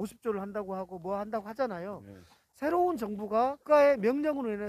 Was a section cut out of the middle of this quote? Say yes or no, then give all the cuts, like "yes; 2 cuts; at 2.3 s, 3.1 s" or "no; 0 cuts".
yes; 1 cut; at 3.6 s